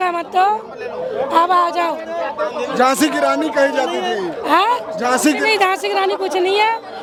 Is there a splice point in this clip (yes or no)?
no